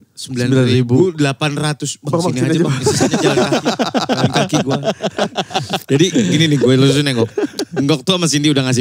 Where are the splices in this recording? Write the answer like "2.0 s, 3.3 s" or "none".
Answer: 5.8 s